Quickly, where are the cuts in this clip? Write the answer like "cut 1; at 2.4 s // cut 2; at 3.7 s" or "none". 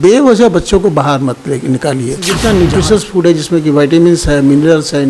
cut 1; at 2.3 s